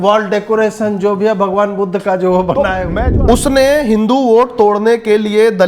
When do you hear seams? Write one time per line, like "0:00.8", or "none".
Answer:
0:02.9